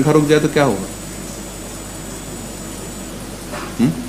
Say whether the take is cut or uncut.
uncut